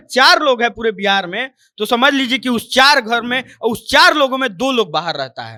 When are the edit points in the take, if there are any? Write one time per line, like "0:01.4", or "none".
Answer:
none